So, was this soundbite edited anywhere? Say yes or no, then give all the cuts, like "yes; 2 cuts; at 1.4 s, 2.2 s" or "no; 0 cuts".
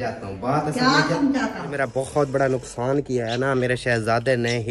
yes; 1 cut; at 1.8 s